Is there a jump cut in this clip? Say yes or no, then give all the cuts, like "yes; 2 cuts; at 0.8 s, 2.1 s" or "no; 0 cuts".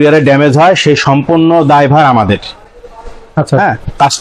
no; 0 cuts